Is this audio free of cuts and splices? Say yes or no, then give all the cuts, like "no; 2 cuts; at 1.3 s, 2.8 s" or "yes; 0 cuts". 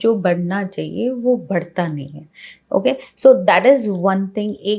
yes; 0 cuts